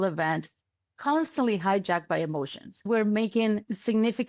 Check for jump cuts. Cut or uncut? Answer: cut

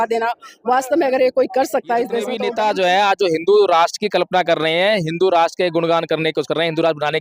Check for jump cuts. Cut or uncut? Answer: cut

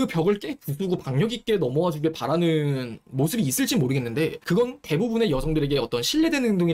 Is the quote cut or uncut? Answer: uncut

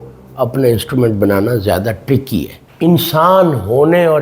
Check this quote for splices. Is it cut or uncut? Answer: cut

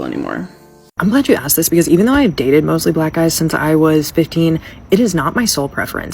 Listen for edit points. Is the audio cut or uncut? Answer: cut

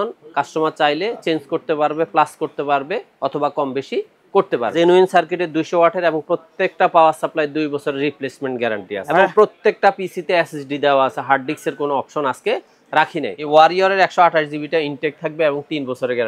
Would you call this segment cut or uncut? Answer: cut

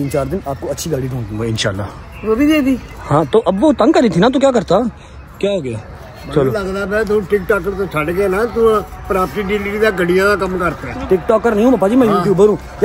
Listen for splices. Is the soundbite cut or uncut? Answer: uncut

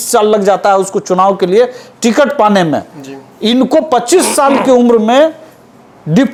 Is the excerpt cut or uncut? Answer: uncut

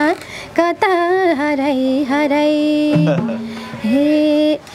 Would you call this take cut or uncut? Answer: uncut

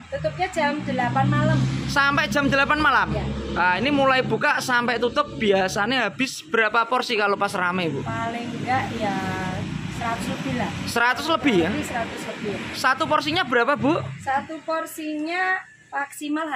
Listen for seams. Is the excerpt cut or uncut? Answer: uncut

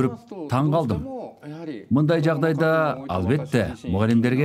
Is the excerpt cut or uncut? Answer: uncut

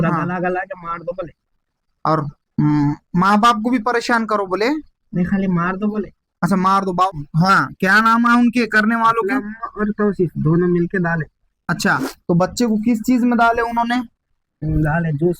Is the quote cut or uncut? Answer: cut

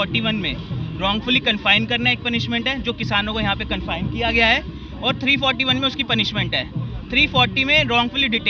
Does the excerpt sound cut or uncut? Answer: uncut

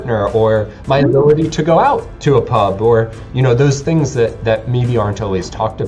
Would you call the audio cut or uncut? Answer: uncut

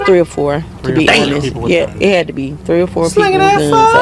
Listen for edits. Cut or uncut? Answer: uncut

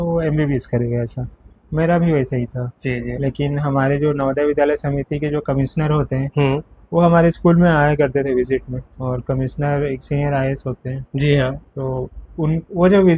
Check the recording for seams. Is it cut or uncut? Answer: uncut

